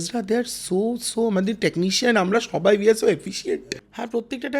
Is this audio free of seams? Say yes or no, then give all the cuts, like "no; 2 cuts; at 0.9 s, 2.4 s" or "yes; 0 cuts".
no; 1 cut; at 3.6 s